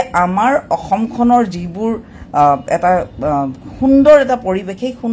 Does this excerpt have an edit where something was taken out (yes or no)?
no